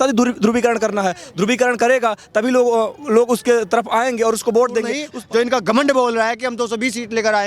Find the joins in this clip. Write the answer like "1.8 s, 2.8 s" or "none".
5.1 s